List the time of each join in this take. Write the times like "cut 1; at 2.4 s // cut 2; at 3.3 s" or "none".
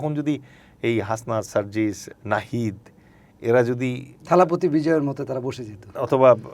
cut 1; at 2.1 s